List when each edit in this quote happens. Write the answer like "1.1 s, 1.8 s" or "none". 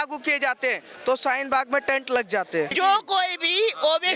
2.7 s